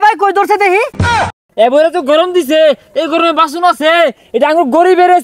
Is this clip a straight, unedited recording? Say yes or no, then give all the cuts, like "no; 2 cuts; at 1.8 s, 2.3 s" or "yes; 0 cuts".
no; 1 cut; at 1.3 s